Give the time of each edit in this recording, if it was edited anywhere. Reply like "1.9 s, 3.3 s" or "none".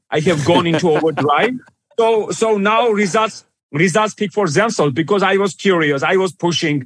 none